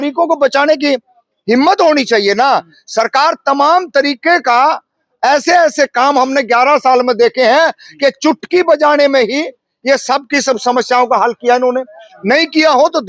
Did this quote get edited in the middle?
no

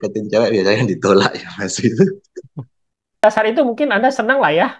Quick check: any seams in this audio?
yes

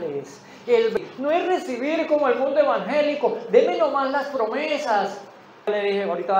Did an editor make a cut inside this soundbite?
yes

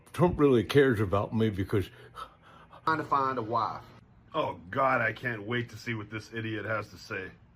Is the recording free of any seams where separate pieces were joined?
no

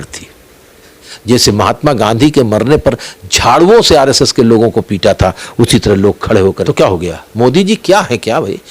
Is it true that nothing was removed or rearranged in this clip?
no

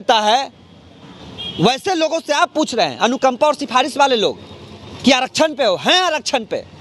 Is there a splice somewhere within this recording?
no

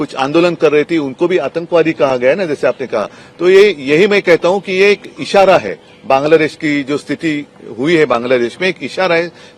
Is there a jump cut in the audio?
no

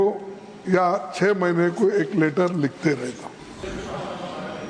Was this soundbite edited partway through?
yes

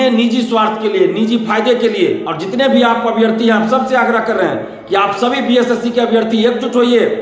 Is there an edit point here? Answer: yes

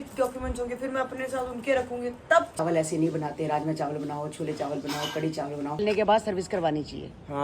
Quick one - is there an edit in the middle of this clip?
yes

